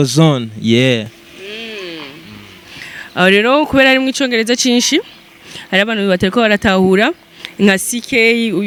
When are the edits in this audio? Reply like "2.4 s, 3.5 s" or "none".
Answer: none